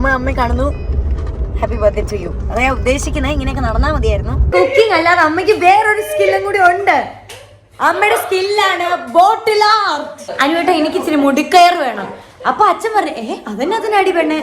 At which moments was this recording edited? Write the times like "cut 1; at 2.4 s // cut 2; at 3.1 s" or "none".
cut 1; at 4.5 s // cut 2; at 10.3 s

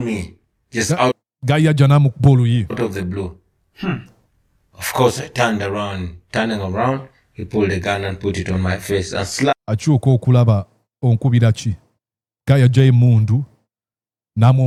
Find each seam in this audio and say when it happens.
none

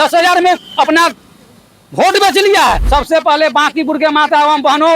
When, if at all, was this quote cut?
cut 1; at 2.8 s

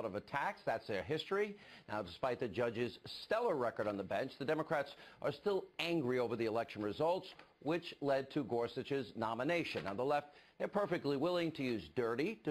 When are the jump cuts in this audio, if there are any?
cut 1; at 9.8 s

